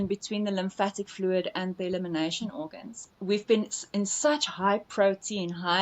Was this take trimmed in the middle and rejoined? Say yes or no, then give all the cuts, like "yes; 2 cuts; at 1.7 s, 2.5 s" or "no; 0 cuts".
yes; 1 cut; at 3.1 s